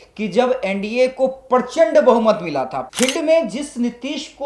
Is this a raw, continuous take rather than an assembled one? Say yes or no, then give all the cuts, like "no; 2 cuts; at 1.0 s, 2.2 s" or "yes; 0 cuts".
no; 1 cut; at 2.8 s